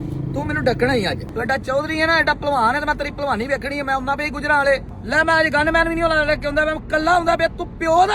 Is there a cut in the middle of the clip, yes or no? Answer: yes